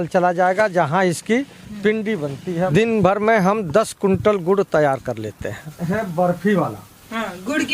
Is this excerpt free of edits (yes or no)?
no